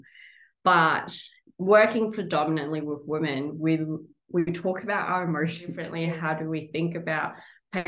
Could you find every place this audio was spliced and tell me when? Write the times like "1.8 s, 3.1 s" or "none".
5.8 s

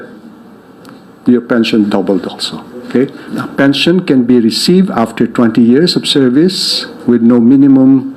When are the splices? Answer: 3.3 s

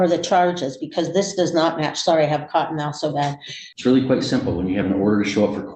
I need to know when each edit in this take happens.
3.6 s

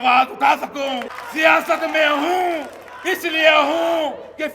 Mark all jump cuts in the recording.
1.2 s

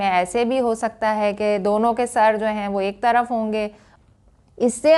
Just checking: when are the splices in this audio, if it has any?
3.9 s

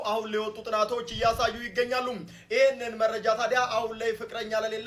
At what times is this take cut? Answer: none

